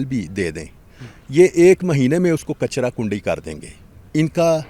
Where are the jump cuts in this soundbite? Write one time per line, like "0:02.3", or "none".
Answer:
none